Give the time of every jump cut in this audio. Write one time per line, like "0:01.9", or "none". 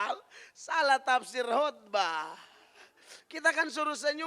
none